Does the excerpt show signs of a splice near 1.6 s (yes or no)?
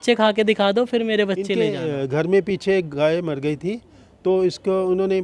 yes